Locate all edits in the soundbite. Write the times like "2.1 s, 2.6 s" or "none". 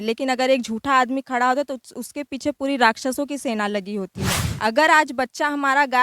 4.5 s

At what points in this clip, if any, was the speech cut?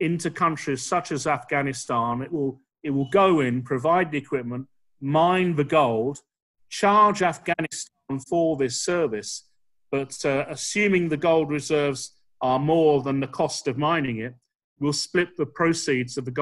none

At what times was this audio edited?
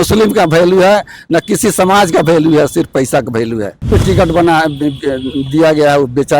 3.9 s

